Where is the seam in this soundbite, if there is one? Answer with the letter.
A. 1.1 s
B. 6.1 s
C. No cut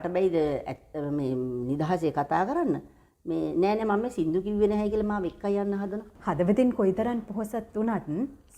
B